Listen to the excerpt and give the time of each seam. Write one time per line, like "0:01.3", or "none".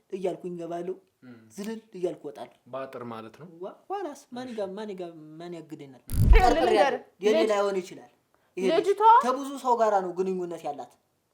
0:06.3